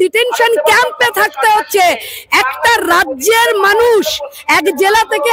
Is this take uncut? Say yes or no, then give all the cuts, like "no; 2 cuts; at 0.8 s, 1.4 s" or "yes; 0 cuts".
yes; 0 cuts